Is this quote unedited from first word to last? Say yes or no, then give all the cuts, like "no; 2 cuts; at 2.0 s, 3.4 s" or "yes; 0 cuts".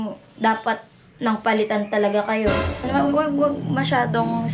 no; 1 cut; at 2.9 s